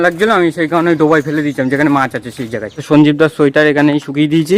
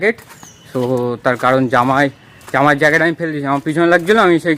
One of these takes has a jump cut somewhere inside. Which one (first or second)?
first